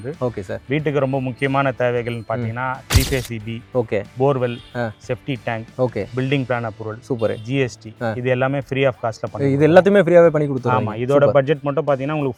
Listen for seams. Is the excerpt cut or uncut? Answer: uncut